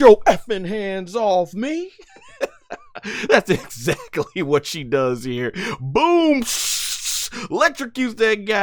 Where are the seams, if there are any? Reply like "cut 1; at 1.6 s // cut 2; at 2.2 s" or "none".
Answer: none